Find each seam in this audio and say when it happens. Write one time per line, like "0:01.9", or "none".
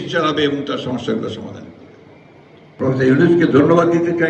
0:02.7